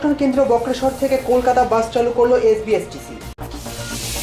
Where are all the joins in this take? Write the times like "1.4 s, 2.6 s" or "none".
none